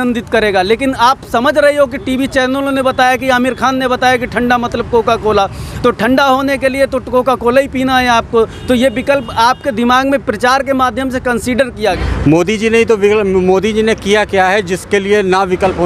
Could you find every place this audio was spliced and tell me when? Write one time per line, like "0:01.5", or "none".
0:12.0